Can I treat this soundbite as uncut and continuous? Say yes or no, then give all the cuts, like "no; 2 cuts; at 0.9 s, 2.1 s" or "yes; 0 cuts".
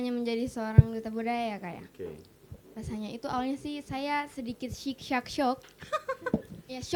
yes; 0 cuts